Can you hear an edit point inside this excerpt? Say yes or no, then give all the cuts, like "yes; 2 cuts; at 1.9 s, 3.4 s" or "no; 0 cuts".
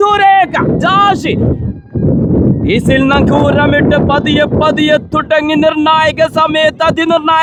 no; 0 cuts